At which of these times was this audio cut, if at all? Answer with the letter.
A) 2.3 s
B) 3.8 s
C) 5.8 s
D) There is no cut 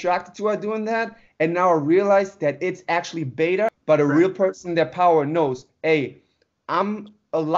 B